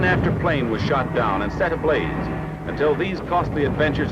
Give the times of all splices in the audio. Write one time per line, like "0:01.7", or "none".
0:01.4